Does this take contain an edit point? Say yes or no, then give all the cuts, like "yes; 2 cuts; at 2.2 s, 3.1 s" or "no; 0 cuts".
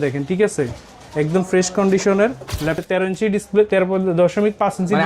yes; 1 cut; at 2.8 s